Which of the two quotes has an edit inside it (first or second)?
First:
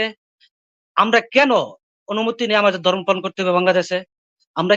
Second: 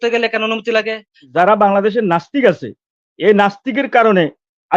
second